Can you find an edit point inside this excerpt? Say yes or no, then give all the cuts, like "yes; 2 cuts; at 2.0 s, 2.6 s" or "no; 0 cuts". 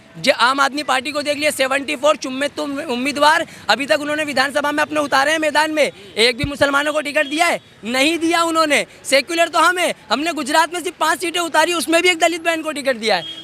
no; 0 cuts